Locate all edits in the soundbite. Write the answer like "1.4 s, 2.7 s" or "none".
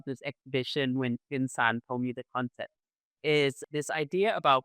3.6 s